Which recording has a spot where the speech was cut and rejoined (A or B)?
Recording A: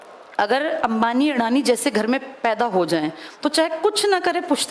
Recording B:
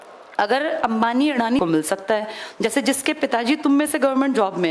B